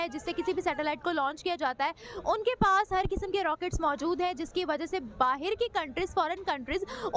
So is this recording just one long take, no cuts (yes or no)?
yes